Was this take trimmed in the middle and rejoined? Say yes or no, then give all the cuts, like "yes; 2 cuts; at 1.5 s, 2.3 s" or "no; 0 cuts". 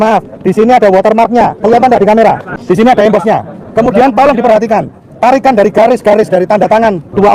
yes; 1 cut; at 2.5 s